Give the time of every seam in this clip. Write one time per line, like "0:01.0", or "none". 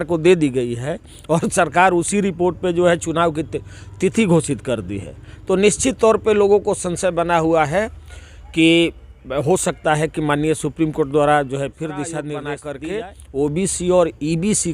0:12.6